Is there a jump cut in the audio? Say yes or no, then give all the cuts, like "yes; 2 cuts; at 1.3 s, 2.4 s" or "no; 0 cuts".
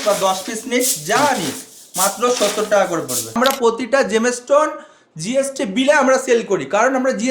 yes; 1 cut; at 3.4 s